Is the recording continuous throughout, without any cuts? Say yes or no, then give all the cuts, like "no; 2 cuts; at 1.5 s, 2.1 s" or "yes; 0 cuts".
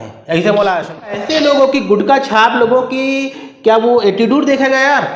no; 1 cut; at 1.1 s